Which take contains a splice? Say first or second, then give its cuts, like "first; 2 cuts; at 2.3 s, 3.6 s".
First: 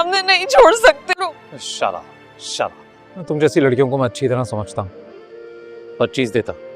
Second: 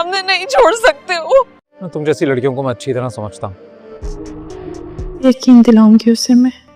second; 1 cut; at 1.0 s